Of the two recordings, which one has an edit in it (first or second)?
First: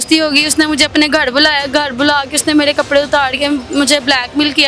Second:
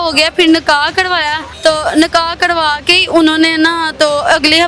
second